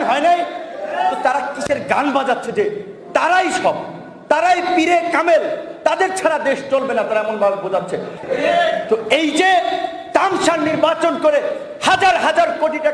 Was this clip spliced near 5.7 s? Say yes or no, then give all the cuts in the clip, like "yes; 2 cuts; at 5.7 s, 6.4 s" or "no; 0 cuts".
no; 1 cut; at 8.1 s